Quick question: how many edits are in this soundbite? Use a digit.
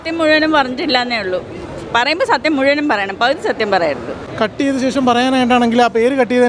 1